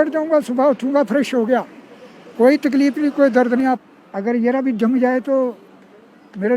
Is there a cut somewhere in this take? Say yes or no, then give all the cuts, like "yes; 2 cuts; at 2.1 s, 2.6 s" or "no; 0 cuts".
yes; 1 cut; at 3.8 s